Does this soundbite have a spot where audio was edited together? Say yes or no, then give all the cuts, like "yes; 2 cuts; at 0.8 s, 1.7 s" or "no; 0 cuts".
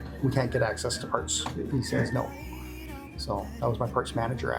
no; 0 cuts